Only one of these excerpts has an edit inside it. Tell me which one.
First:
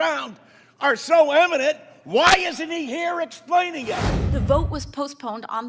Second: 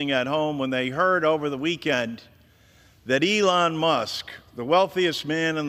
first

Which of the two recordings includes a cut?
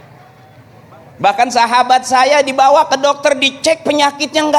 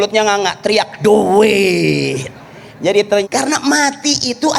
second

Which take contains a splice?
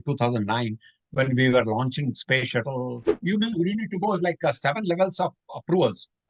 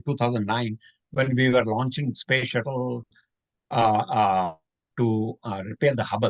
first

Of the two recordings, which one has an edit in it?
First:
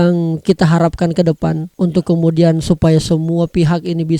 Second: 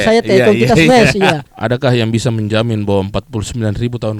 second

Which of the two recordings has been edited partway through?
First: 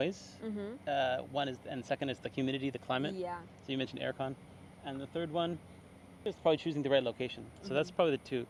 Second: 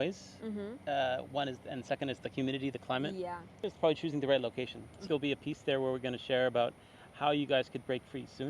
second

